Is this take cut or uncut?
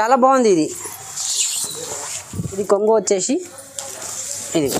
cut